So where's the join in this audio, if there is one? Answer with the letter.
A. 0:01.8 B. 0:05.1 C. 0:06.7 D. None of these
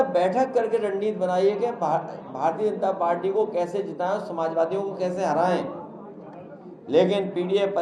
D